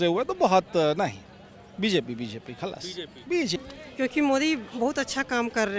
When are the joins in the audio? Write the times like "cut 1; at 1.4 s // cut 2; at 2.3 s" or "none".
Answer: cut 1; at 3.6 s